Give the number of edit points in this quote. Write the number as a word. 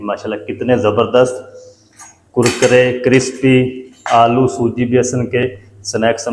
zero